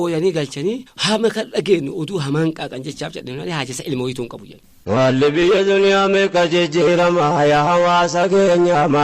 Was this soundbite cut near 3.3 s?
no; 2 cuts; at 0.9 s, 4.9 s

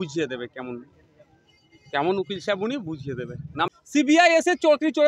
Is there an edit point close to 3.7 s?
yes; 1 cut; at 3.7 s

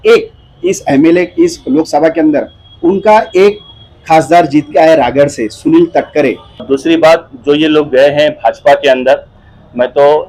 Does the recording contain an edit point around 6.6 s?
yes; 1 cut; at 6.6 s

